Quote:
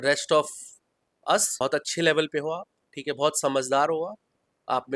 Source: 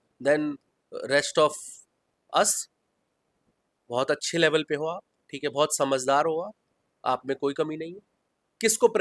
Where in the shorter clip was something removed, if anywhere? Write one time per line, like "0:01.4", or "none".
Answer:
0:01.6